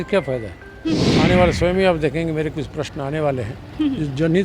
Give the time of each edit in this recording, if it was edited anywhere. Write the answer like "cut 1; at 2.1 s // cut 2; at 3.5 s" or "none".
cut 1; at 1.1 s